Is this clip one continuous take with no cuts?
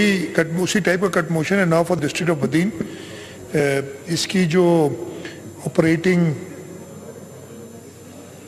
yes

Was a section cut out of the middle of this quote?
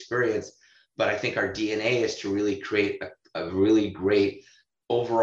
no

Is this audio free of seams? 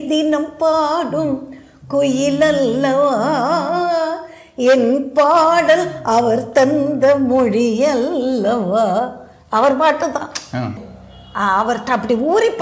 no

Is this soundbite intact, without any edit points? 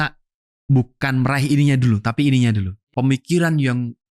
no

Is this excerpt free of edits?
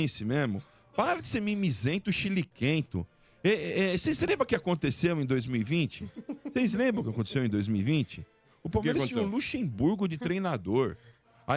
yes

